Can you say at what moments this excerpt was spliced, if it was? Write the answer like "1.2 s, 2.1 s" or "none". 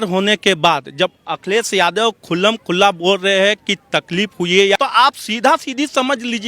4.8 s

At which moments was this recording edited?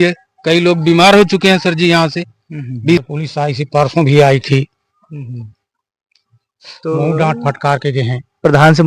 3.0 s

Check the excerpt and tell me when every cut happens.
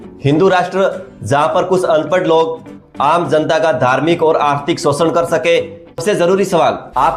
6.0 s

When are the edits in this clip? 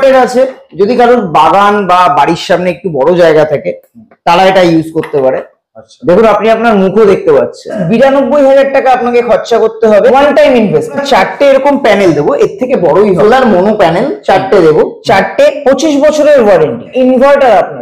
7.8 s, 10.1 s, 11.0 s, 13.2 s, 15.0 s, 16.9 s

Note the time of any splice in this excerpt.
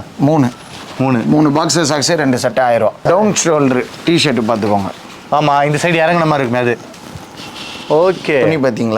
3.0 s

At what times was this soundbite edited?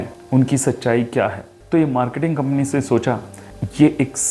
1.5 s

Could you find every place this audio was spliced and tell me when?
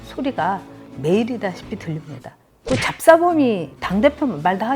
2.5 s, 3.7 s

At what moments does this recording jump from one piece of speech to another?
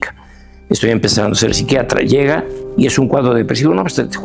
none

